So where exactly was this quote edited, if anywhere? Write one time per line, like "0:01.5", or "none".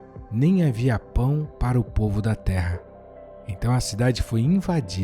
0:01.5